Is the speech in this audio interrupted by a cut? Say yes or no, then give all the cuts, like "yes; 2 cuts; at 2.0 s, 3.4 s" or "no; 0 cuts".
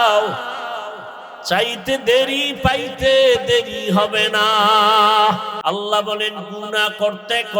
yes; 1 cut; at 5.6 s